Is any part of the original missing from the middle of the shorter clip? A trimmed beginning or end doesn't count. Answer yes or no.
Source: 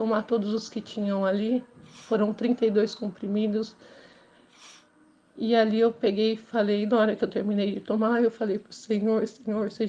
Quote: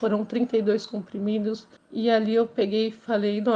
yes